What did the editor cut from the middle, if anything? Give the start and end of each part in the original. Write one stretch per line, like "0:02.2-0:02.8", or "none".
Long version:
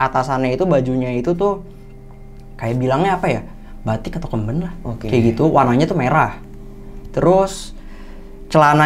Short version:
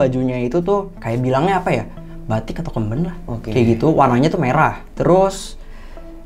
0:01.7-0:02.5
0:06.4-0:07.0